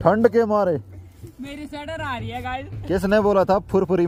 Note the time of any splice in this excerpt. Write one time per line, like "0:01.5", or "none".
none